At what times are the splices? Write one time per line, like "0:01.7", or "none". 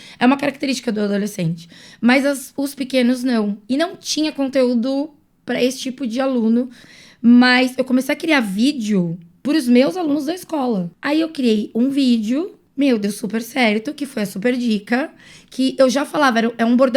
0:06.9
0:10.9
0:12.6